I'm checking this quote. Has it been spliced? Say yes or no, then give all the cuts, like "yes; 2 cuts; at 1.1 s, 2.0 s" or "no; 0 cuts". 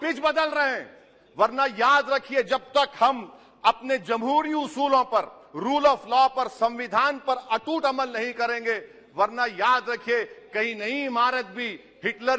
no; 0 cuts